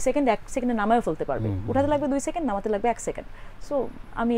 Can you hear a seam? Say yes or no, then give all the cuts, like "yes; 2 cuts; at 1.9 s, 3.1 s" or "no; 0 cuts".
no; 0 cuts